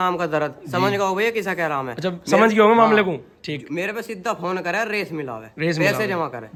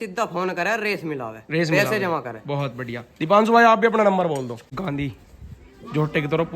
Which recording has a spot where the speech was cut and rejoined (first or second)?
second